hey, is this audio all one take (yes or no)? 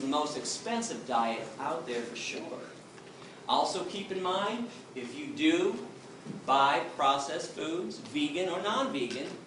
yes